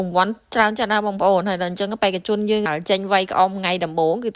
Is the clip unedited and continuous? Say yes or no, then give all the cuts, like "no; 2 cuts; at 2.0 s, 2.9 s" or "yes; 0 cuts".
no; 1 cut; at 2.7 s